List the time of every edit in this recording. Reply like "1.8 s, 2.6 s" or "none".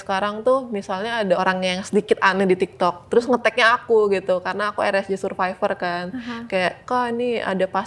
none